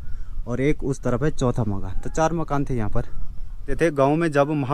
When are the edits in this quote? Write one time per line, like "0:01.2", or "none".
0:03.7